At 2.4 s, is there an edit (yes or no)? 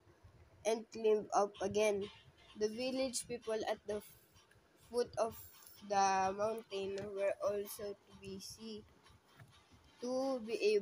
yes